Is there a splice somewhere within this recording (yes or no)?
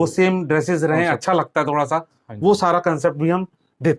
no